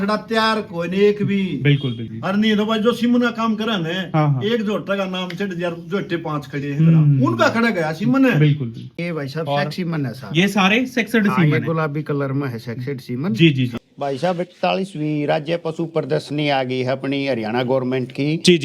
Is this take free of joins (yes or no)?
no